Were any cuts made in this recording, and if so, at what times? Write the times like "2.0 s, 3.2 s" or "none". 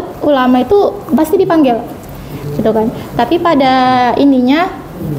none